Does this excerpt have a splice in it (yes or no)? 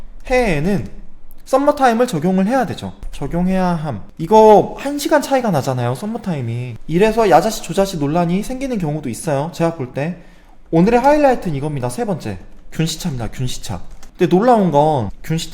yes